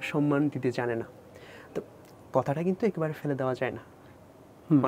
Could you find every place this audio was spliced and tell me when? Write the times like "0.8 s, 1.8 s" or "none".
none